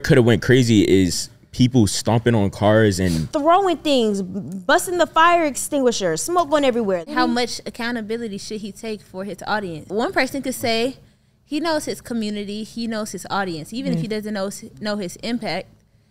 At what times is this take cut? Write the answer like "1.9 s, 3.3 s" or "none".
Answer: 3.3 s, 7.0 s, 9.8 s